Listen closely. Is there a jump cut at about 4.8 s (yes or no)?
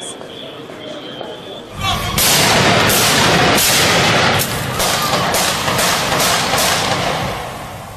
yes